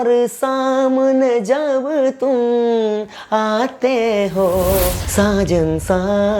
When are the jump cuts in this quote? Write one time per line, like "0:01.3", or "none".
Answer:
0:05.0

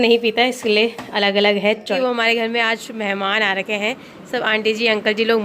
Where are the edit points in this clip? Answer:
0:02.0

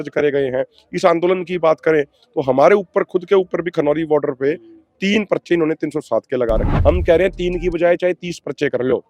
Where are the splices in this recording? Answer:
0:06.7

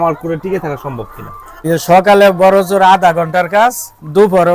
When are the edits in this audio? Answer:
0:01.6

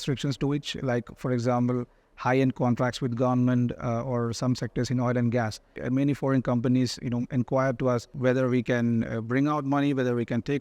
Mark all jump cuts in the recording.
0:05.8
0:08.1

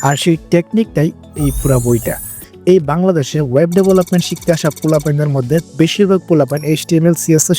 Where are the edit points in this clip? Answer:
0:02.4

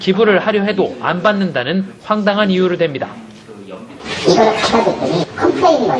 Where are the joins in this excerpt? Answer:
none

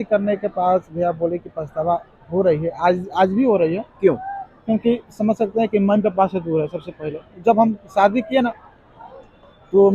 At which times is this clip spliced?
none

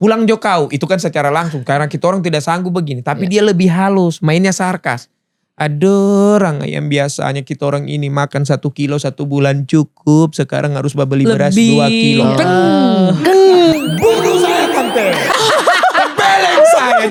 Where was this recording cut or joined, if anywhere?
none

